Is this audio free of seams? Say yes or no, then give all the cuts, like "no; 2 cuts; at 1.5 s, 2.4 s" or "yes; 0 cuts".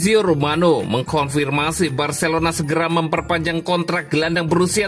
yes; 0 cuts